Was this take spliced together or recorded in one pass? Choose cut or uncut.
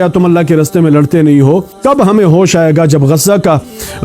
cut